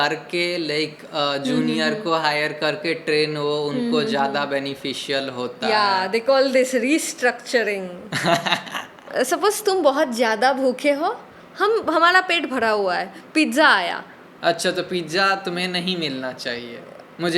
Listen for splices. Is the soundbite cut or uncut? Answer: cut